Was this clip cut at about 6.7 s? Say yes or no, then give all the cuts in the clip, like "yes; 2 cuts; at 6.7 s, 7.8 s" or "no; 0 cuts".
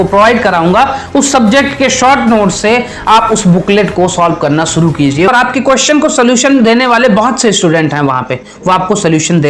no; 1 cut; at 5.3 s